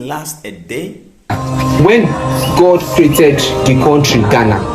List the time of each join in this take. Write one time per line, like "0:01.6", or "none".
0:01.4